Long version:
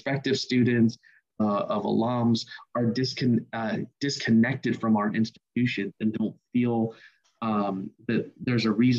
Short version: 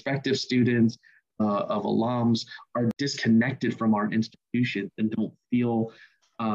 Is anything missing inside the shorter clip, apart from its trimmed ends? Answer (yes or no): yes